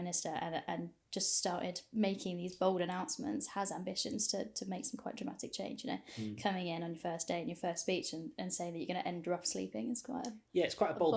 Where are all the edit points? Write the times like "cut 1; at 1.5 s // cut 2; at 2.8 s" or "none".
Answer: none